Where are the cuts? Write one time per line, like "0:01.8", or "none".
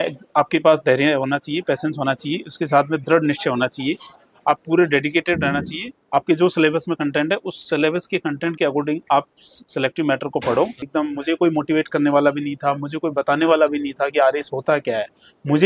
0:06.0
0:10.8